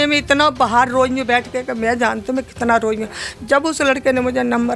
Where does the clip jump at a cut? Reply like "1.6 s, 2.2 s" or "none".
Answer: none